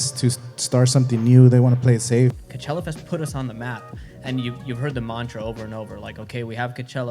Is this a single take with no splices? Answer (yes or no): no